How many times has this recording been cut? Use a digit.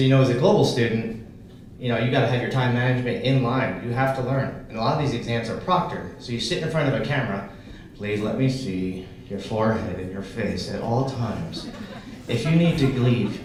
0